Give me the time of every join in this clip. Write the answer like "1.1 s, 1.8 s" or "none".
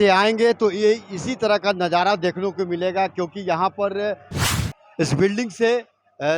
4.3 s